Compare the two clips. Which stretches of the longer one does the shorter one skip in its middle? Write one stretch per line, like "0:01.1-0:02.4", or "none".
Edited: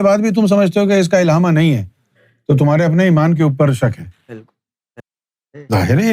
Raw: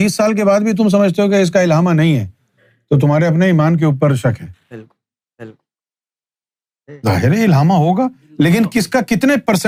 0:05.4-0:06.3